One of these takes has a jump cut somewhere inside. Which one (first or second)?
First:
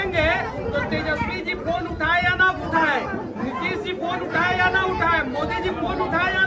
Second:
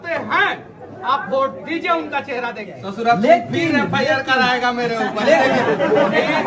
second